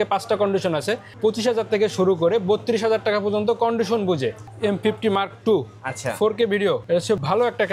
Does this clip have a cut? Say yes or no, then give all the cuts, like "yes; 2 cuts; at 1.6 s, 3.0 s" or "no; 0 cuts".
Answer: yes; 2 cuts; at 1.1 s, 4.4 s